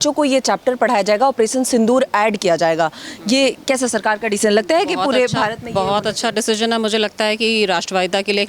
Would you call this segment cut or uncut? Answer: uncut